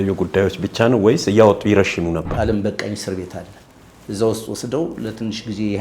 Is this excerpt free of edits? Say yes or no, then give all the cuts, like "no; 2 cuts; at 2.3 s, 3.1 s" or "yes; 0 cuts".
no; 1 cut; at 2.3 s